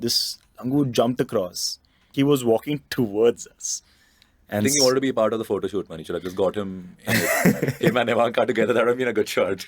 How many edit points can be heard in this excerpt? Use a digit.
1